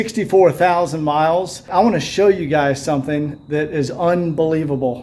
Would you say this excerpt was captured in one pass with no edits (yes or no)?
no